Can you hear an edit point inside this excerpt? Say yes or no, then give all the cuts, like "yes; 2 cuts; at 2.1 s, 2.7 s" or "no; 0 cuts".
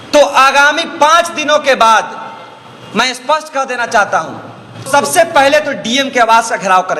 yes; 1 cut; at 4.9 s